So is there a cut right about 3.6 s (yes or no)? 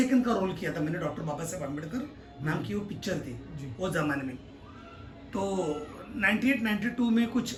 no